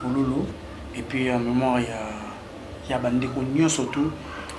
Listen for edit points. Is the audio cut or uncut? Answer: uncut